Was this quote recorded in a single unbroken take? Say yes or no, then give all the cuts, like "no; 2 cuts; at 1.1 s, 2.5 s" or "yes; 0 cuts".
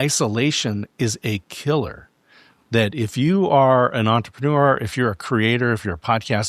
yes; 0 cuts